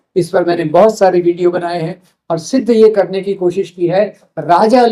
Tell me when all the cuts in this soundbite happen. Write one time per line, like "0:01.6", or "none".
none